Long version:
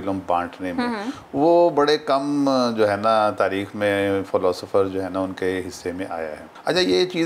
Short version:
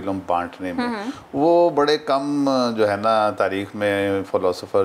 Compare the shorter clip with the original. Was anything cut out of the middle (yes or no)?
no